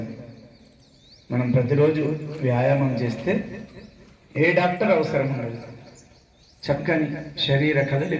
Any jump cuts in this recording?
no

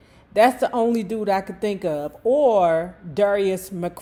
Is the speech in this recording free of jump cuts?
yes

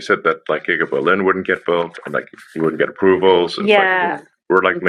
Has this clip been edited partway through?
no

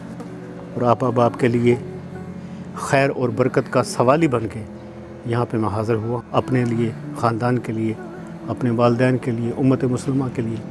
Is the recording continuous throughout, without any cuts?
no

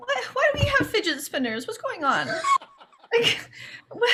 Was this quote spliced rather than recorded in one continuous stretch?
no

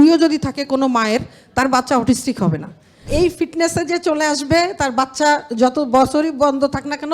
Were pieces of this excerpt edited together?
yes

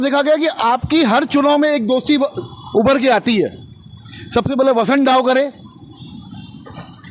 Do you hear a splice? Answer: no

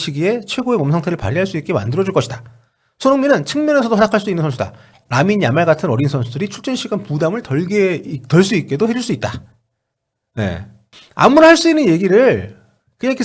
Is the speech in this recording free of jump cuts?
no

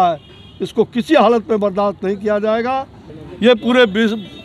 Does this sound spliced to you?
no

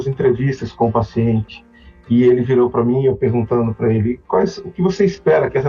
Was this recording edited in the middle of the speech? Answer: no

